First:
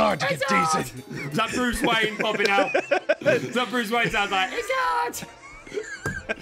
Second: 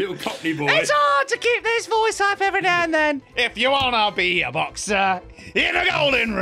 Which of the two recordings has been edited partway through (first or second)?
second